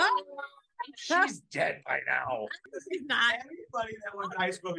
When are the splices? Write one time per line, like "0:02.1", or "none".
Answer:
0:02.6